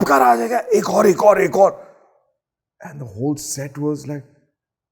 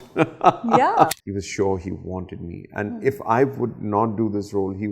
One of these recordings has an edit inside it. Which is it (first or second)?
second